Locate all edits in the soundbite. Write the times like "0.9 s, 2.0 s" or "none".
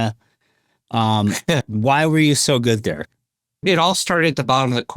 3.6 s